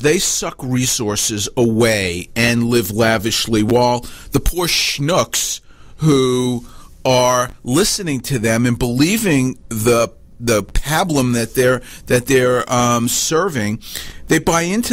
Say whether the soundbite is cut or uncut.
uncut